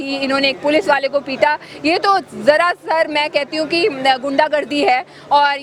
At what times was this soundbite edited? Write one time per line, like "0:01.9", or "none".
none